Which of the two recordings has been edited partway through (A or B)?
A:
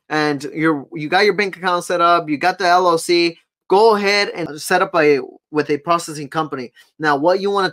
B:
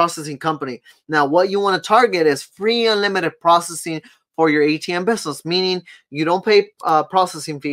A